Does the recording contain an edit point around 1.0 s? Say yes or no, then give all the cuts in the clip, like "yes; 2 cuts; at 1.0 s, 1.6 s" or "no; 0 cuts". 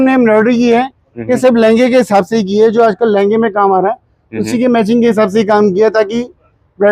no; 0 cuts